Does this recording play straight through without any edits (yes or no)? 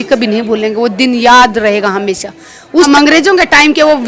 no